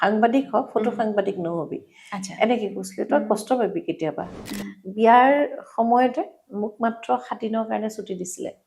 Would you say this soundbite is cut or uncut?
cut